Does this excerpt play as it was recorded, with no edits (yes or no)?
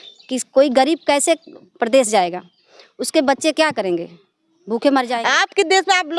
no